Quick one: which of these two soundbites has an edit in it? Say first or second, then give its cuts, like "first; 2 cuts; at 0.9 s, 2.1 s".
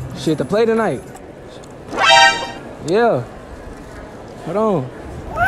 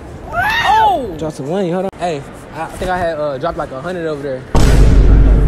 second; 2 cuts; at 1.9 s, 4.5 s